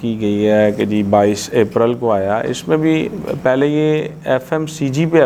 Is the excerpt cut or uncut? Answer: uncut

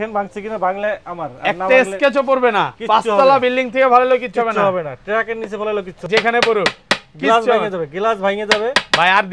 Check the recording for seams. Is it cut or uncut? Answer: cut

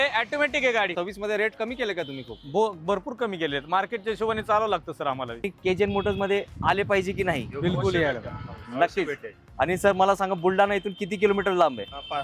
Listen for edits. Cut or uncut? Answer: cut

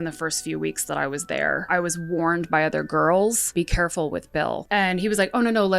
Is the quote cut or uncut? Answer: cut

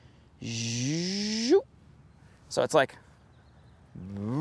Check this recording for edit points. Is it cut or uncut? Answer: uncut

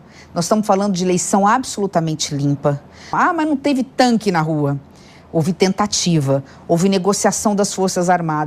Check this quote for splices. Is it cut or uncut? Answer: cut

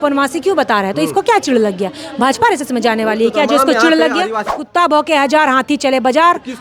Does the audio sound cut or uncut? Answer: cut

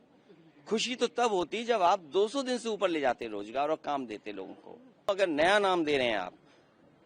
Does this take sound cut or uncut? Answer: cut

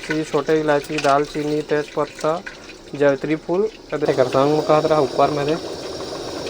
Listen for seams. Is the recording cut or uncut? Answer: cut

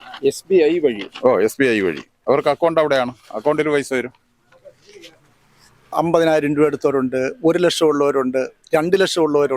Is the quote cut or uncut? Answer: cut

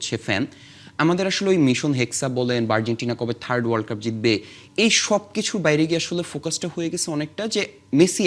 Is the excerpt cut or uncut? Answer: uncut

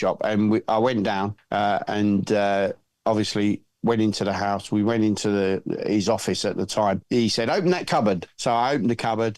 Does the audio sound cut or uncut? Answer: cut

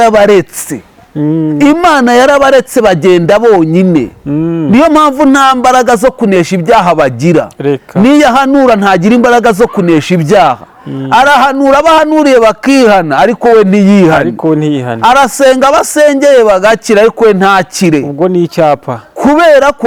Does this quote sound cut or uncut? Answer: uncut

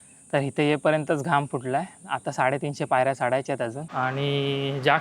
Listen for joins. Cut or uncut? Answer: cut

